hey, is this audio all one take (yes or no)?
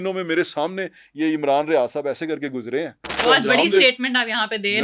no